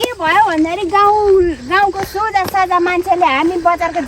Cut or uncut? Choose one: uncut